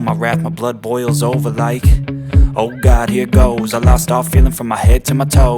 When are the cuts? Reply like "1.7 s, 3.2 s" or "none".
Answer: 3.0 s